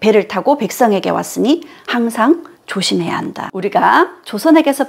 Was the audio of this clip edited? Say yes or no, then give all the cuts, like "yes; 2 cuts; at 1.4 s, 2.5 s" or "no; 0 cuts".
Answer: yes; 1 cut; at 3.6 s